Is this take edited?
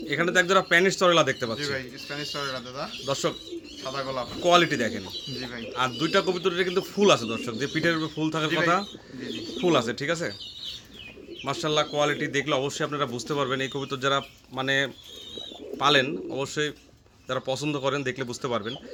no; 0 cuts

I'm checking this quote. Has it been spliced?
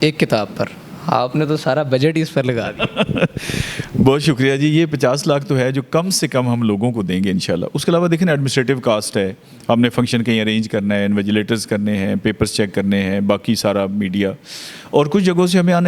no; 0 cuts

